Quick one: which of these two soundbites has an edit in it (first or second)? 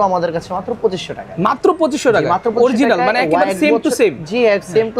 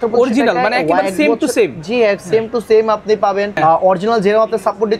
second